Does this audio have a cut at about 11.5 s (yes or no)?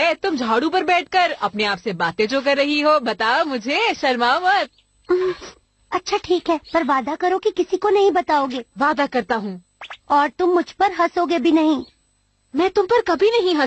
no